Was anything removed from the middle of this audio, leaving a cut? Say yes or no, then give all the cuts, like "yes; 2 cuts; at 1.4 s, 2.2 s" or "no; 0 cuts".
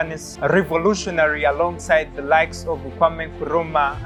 no; 0 cuts